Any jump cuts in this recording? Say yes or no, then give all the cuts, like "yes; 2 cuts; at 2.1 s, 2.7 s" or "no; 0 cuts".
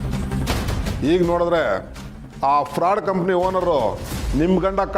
yes; 1 cut; at 0.9 s